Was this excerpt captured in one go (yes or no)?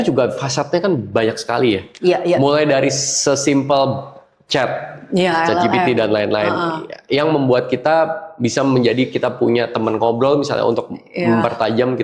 yes